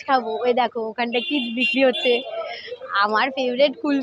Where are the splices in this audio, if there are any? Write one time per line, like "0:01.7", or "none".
none